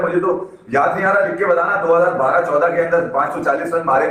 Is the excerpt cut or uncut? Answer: uncut